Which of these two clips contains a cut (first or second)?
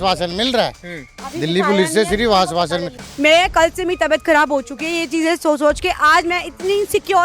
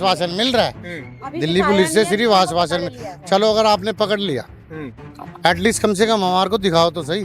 first